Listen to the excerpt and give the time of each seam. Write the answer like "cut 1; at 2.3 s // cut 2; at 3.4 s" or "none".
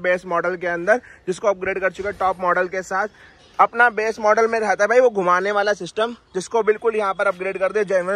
none